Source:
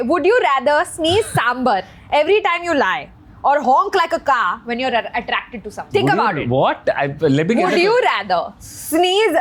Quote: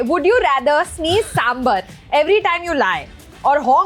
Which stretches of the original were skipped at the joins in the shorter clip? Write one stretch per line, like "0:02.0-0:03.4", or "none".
none